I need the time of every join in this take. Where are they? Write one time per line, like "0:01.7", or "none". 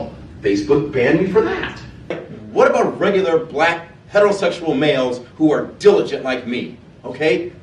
0:02.3